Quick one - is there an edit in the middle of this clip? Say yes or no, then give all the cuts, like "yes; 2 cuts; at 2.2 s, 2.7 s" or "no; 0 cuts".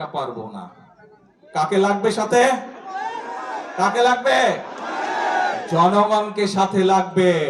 no; 0 cuts